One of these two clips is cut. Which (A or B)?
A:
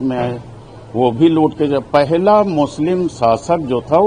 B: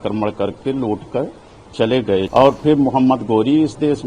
B